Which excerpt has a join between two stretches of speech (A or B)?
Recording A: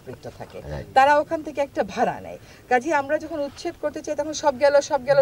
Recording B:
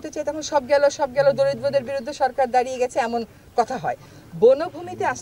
B